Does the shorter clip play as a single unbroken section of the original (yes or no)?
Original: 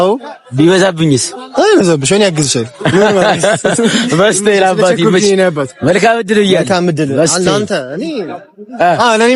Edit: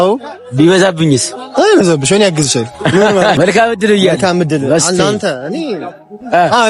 no